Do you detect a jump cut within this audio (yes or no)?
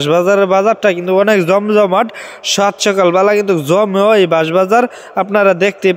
no